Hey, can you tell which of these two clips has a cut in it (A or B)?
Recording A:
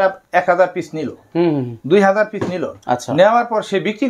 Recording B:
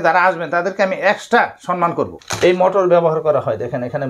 B